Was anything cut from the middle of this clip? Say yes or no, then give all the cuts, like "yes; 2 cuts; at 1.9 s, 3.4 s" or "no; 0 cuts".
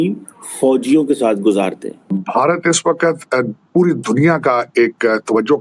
yes; 1 cut; at 2.3 s